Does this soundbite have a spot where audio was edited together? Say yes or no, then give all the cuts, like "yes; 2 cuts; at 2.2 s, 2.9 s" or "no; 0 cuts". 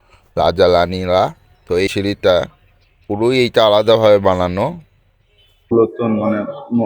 yes; 2 cuts; at 1.9 s, 5.7 s